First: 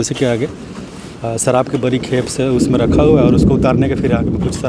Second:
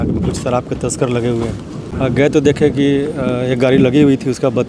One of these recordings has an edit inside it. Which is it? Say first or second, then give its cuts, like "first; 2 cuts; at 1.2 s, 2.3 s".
second; 1 cut; at 1.9 s